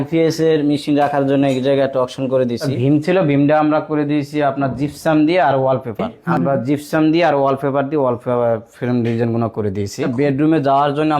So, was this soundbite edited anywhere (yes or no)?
yes